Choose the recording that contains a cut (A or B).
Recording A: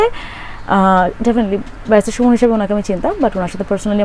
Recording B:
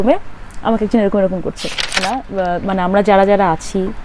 B